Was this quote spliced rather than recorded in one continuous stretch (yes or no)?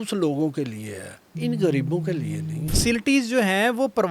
yes